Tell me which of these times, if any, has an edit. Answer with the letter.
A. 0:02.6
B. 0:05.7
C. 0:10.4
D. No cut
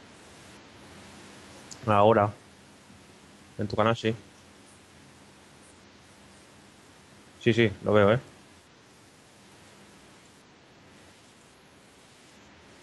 B